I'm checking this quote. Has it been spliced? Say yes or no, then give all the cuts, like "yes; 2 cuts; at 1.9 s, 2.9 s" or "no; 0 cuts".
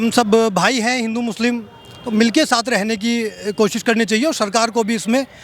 no; 0 cuts